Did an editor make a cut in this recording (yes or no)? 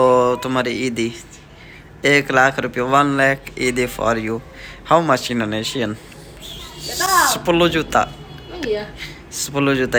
no